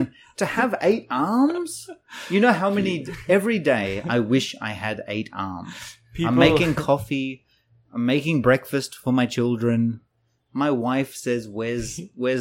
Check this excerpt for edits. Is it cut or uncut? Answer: uncut